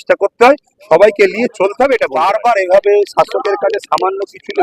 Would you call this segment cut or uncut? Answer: cut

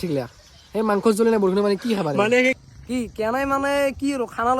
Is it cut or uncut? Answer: cut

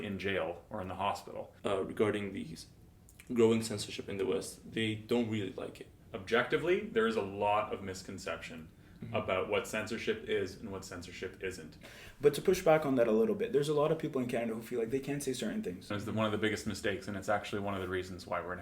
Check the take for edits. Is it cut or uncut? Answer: cut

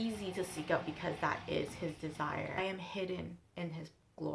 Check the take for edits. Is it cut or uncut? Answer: cut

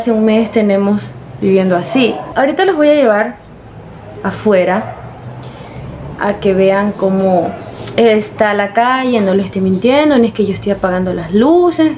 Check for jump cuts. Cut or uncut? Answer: uncut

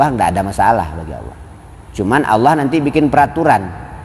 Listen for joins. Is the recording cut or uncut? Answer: uncut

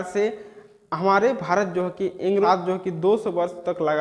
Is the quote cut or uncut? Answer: cut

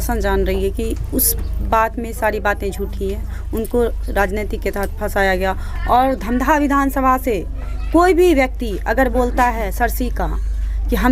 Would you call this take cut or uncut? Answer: uncut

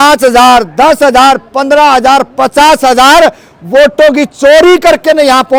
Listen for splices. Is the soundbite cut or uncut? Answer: uncut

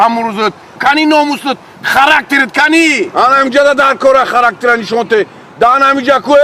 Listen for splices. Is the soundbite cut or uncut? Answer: uncut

